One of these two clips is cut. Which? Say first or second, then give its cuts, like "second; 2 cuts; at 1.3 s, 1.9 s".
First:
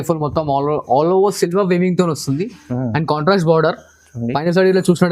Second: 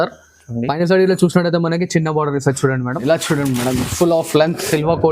second; 1 cut; at 2.9 s